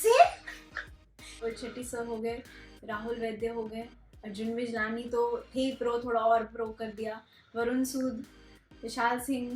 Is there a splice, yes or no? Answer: yes